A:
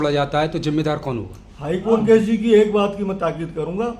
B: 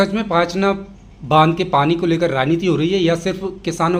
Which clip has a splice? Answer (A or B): A